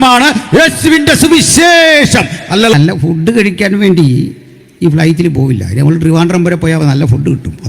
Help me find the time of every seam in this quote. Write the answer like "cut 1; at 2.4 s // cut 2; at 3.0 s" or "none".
cut 1; at 2.7 s

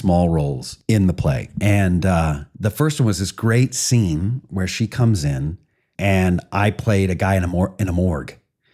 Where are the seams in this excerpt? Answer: cut 1; at 1.5 s

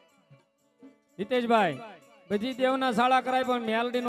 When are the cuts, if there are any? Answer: none

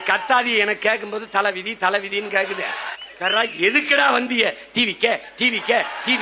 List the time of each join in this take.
cut 1; at 2.9 s

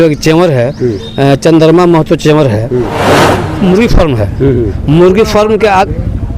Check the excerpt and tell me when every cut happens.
cut 1; at 3.4 s

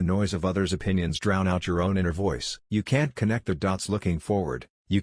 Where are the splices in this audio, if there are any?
cut 1; at 2.5 s

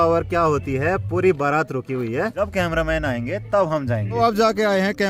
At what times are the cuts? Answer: cut 1; at 2.4 s // cut 2; at 4.2 s

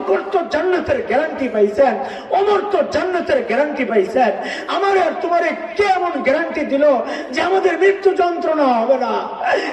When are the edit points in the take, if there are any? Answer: none

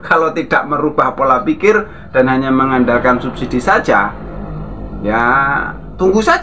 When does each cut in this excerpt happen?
none

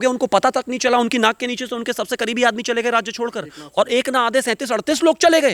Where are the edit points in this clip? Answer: none

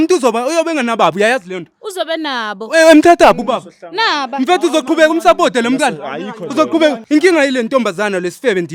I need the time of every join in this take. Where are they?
none

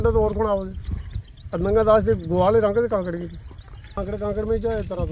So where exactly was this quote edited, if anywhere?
cut 1; at 4.0 s

